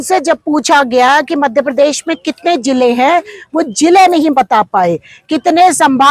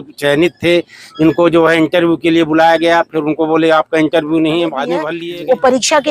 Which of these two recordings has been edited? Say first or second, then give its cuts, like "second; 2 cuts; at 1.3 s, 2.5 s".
second; 1 cut; at 5.1 s